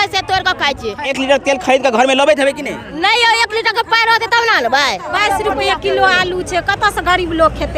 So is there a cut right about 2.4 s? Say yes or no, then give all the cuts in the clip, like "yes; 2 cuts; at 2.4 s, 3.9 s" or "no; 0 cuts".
no; 2 cuts; at 1.1 s, 5.1 s